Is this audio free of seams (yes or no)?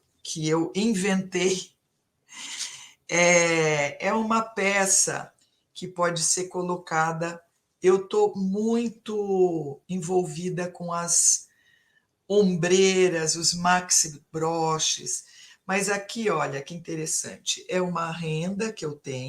yes